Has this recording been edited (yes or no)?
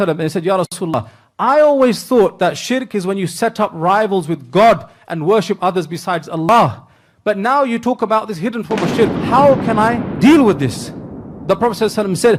no